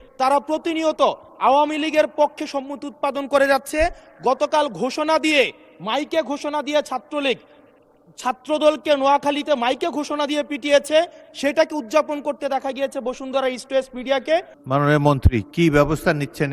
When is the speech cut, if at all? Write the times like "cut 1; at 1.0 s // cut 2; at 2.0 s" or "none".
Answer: cut 1; at 14.6 s